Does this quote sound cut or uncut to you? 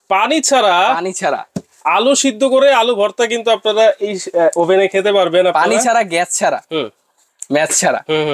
uncut